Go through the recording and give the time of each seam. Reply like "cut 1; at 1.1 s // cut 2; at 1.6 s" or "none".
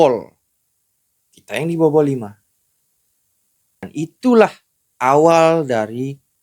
cut 1; at 3.9 s